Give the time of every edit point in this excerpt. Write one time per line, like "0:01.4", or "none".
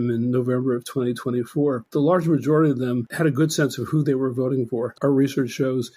0:01.8
0:03.1
0:04.9